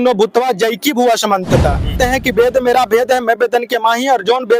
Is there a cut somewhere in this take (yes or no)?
yes